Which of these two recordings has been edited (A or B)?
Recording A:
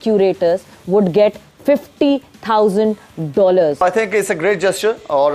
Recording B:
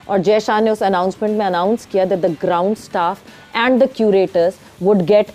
A